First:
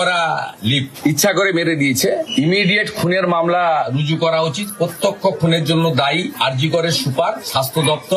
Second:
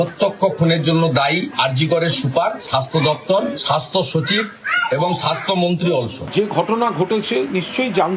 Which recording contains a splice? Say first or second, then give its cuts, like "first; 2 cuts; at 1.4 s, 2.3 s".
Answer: second; 1 cut; at 6.2 s